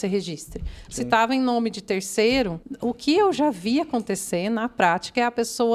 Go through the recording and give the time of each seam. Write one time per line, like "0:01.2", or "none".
0:02.6